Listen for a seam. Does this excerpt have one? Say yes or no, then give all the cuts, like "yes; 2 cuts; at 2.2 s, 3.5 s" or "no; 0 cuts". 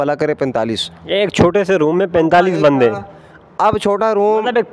no; 0 cuts